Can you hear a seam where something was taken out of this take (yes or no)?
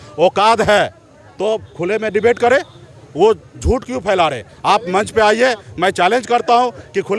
no